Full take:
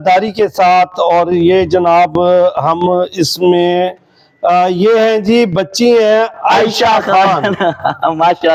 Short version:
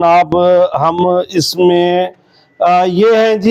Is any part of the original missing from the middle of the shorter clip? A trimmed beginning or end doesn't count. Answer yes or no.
no